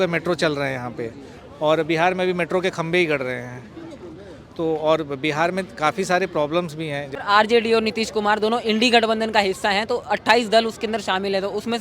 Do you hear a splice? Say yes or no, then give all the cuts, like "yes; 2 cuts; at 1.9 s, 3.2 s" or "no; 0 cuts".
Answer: yes; 1 cut; at 7.1 s